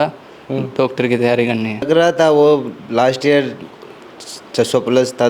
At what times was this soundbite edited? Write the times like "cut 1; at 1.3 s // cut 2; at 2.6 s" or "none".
cut 1; at 1.9 s